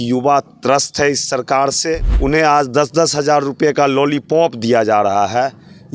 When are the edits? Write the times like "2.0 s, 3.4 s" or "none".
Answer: 2.1 s